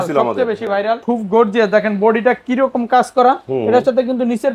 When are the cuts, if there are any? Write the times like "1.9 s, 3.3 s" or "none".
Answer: 1.0 s